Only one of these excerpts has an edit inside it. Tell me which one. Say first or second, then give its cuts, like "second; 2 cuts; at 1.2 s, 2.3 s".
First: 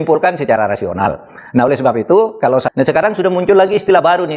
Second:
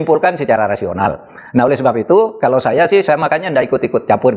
first; 1 cut; at 2.7 s